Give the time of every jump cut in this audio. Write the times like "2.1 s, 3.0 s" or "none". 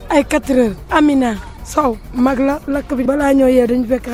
none

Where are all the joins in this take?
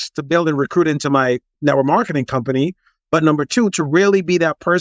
1.5 s

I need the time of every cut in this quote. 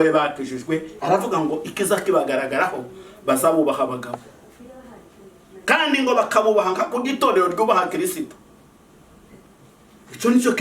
0.9 s

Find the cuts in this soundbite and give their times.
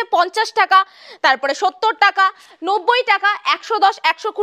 none

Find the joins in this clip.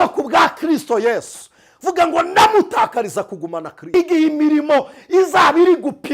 3.8 s

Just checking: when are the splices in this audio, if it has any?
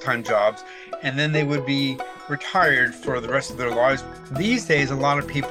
4.1 s

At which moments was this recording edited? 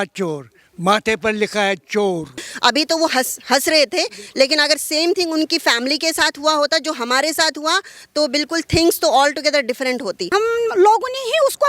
2.4 s, 10.2 s

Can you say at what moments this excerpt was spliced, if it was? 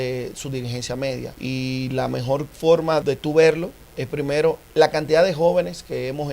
1.3 s, 3.0 s

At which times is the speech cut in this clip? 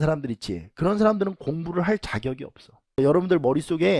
3.0 s

